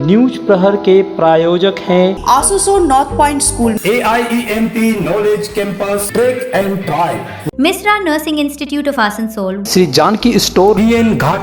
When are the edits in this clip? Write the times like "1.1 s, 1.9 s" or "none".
none